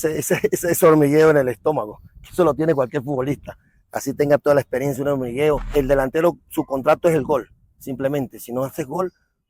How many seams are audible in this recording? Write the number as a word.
one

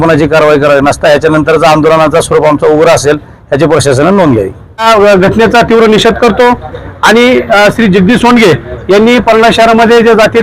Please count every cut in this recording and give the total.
one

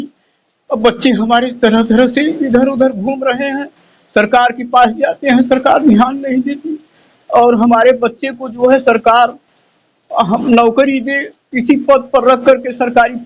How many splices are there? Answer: zero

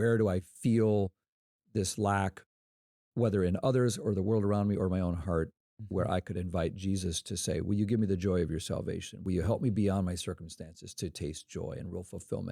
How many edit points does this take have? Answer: zero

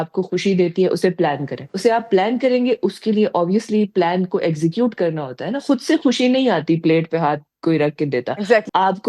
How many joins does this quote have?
zero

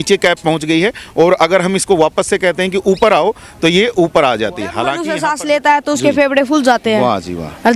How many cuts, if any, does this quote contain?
one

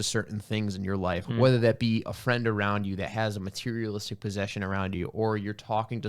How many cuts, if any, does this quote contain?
one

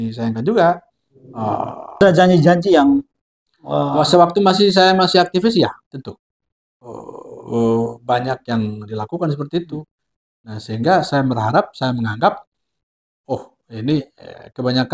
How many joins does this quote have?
one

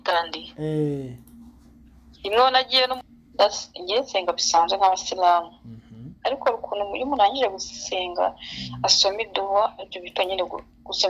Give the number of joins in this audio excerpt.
one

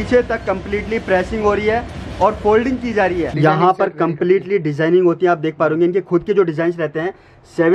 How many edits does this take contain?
one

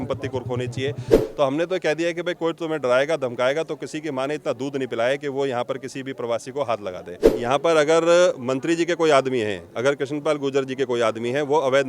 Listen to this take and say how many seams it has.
two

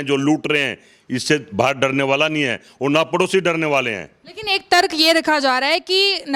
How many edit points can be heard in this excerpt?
zero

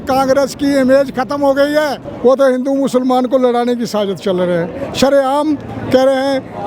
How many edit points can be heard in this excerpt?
one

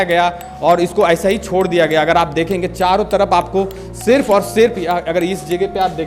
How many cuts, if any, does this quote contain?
zero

